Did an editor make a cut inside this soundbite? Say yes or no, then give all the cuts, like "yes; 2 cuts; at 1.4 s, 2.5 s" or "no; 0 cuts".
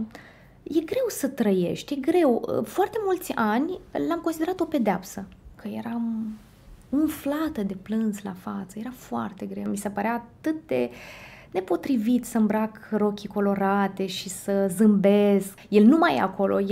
yes; 3 cuts; at 5.5 s, 9.6 s, 15.6 s